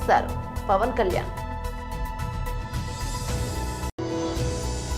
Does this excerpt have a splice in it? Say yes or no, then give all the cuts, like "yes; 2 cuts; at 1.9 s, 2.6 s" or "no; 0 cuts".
yes; 2 cuts; at 1.3 s, 3.9 s